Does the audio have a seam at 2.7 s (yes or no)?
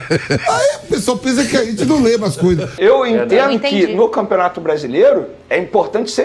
yes